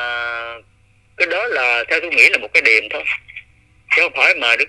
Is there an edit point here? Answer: no; 0 cuts

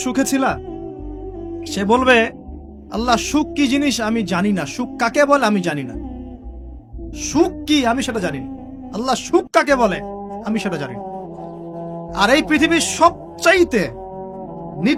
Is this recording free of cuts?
yes; 0 cuts

